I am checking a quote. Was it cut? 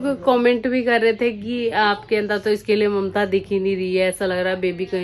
no; 0 cuts

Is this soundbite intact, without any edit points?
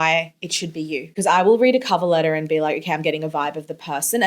no; 1 cut; at 1.1 s

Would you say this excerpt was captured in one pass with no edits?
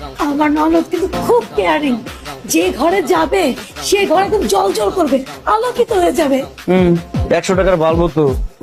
yes; 0 cuts

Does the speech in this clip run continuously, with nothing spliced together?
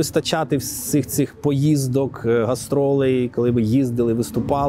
yes; 0 cuts

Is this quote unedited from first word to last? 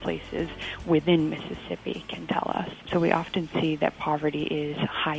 no; 1 cut; at 2.8 s

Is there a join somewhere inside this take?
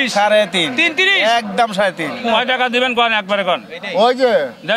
yes; 1 cut; at 2.1 s

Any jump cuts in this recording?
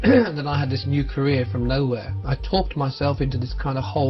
yes; 1 cut; at 2.1 s

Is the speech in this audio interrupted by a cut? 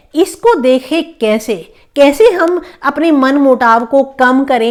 no; 0 cuts

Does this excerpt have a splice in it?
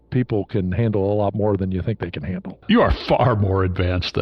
yes; 1 cut; at 2.6 s

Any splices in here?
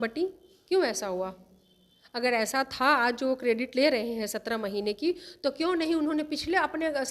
no; 0 cuts

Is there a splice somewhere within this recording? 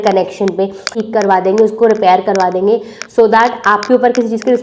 yes; 1 cut; at 0.9 s

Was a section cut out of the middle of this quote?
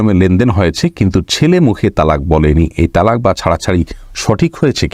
no; 0 cuts

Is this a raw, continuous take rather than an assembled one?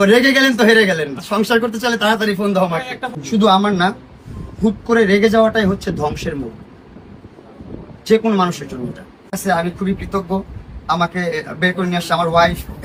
yes; 0 cuts

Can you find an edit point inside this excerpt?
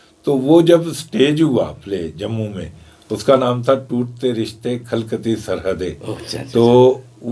no; 0 cuts

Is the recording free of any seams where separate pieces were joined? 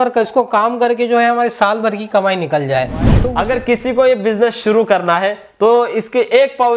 no; 1 cut; at 3.1 s

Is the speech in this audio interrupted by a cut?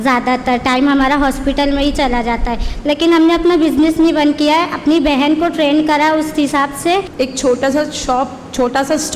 yes; 1 cut; at 7.1 s

